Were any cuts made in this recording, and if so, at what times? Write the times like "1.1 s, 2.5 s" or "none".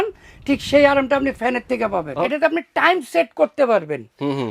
2.1 s